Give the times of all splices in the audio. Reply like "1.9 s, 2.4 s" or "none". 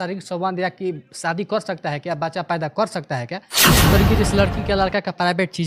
3.8 s

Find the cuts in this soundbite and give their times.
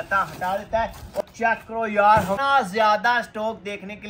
1.2 s, 2.4 s

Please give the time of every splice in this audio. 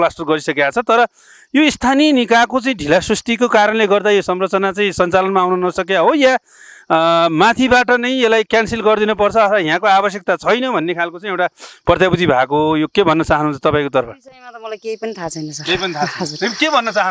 none

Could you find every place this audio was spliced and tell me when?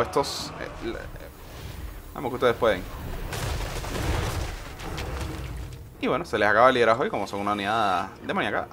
0.9 s

